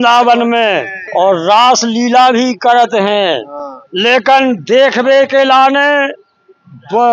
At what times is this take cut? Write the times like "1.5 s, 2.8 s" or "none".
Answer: none